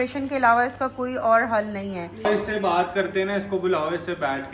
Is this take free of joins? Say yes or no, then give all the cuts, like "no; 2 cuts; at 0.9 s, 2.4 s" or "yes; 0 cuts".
no; 1 cut; at 2.2 s